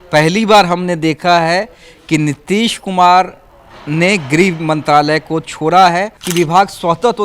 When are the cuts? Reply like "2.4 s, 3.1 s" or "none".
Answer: 6.2 s